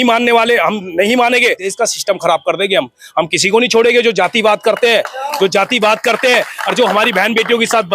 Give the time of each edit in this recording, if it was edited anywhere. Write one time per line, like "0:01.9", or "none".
0:01.7